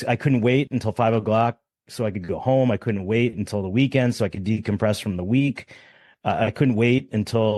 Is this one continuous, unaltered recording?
yes; 0 cuts

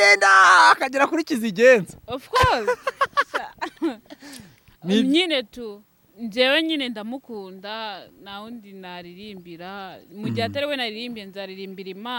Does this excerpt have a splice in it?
no; 0 cuts

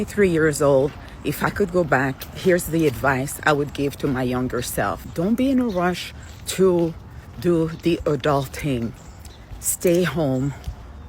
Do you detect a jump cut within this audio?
no; 0 cuts

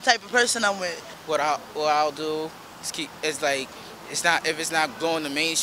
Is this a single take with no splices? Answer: no; 1 cut; at 1.1 s

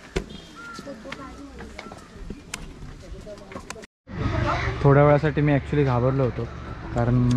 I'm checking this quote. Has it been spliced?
yes; 1 cut; at 3.9 s

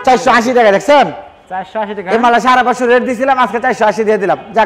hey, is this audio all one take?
yes; 0 cuts

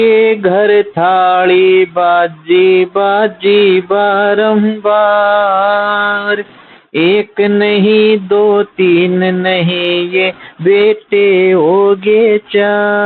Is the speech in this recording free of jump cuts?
yes; 0 cuts

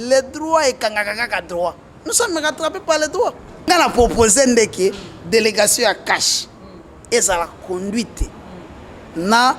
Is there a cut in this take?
yes; 1 cut; at 3.7 s

